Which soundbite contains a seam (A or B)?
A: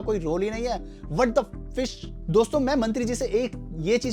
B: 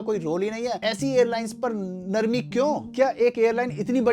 B